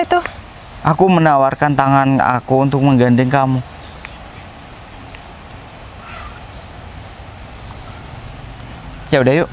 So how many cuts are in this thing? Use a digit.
0